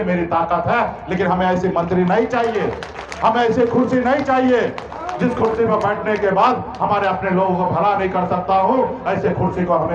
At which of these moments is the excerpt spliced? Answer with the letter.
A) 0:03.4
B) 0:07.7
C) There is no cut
C